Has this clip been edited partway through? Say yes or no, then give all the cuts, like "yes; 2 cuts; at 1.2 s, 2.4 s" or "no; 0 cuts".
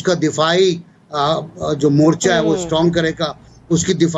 no; 0 cuts